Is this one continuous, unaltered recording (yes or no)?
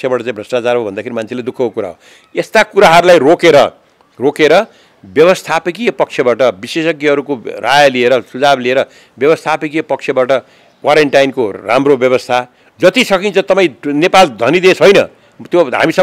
yes